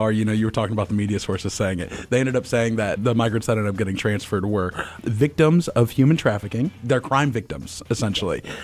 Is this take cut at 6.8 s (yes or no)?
yes